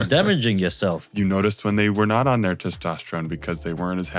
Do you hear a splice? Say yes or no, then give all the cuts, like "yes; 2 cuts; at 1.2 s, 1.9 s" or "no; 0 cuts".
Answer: yes; 1 cut; at 1.0 s